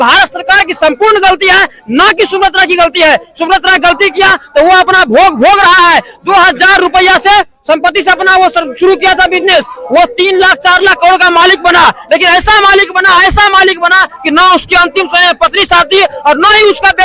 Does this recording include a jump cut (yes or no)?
no